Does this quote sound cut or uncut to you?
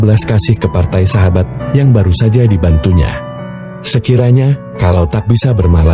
uncut